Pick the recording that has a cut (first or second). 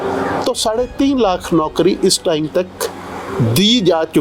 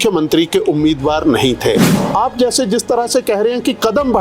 second